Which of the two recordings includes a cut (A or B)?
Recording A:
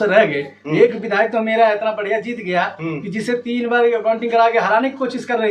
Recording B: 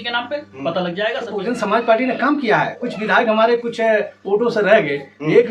B